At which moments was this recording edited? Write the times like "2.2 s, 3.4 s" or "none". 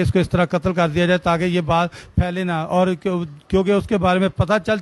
none